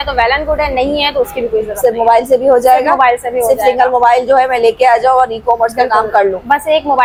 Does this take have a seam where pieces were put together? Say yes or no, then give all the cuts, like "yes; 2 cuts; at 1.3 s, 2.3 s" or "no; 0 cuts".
no; 0 cuts